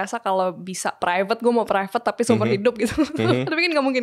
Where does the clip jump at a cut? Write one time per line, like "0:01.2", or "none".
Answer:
none